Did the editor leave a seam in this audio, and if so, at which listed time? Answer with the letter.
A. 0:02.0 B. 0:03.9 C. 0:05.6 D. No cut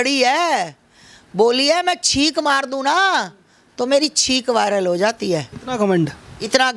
C